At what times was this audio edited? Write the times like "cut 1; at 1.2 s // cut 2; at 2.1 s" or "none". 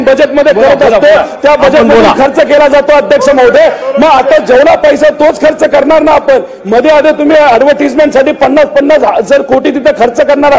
none